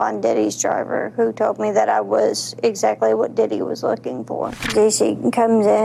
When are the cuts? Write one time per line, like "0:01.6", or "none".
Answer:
0:04.6